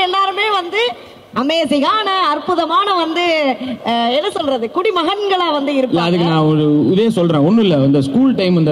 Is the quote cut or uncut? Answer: uncut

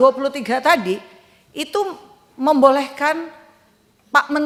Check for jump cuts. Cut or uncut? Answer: uncut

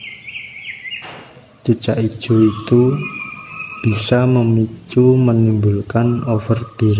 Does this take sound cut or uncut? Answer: uncut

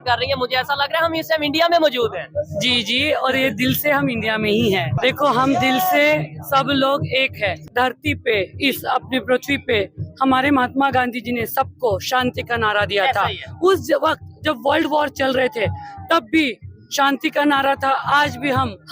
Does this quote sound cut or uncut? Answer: cut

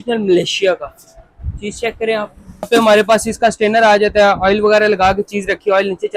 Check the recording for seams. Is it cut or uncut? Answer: cut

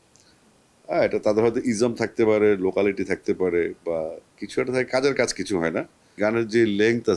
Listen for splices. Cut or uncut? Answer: cut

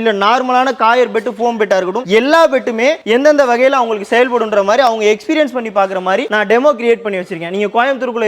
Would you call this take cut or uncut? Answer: uncut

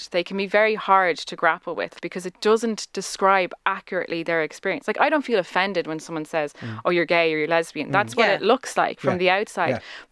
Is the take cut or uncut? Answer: cut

